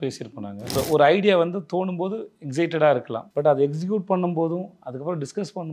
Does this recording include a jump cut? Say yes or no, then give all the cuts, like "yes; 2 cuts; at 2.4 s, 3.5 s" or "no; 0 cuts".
yes; 2 cuts; at 0.7 s, 3.2 s